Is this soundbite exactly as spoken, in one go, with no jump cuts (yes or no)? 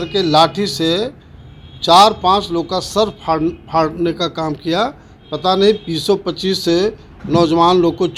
yes